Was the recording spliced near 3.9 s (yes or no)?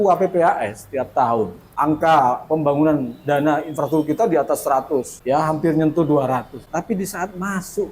no